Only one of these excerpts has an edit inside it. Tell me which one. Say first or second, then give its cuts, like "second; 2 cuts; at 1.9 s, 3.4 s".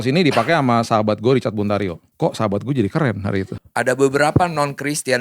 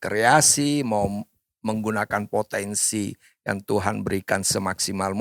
first; 2 cuts; at 2.0 s, 3.5 s